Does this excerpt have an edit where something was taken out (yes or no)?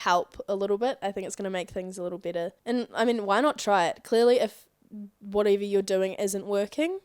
yes